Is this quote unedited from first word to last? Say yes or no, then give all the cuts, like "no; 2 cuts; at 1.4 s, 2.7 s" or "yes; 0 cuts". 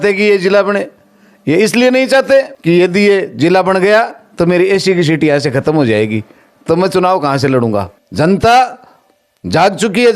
no; 2 cuts; at 2.5 s, 8.0 s